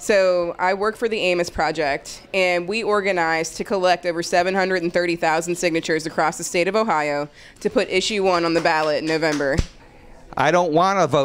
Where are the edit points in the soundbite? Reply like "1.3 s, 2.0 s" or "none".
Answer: 9.8 s